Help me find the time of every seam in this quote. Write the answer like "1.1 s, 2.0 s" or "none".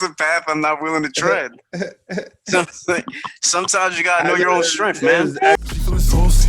5.6 s